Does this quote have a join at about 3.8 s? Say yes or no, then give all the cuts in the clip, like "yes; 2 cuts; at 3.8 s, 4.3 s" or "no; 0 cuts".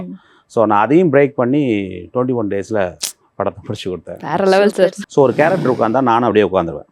no; 1 cut; at 5.0 s